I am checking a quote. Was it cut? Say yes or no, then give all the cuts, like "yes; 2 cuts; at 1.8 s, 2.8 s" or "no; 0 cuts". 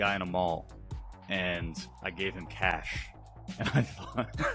no; 0 cuts